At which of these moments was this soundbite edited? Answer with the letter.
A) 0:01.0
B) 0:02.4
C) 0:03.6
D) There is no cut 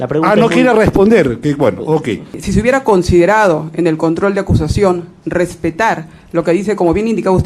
B